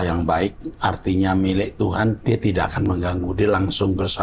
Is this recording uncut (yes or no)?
no